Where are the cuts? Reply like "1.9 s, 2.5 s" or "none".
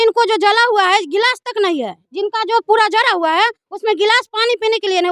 none